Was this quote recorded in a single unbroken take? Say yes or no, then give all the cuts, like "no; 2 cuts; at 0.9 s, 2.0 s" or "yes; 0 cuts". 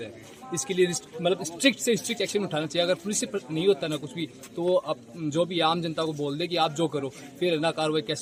yes; 0 cuts